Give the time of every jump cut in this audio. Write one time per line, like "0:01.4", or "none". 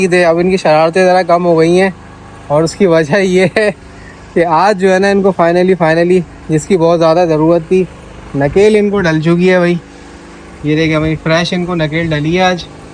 none